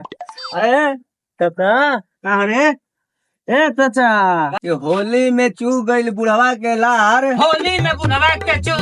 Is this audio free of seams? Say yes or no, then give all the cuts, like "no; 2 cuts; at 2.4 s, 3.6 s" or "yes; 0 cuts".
no; 1 cut; at 4.5 s